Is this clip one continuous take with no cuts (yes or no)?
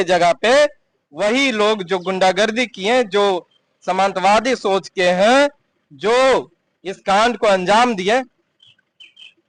yes